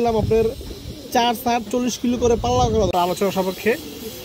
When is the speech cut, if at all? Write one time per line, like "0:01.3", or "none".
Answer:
0:02.9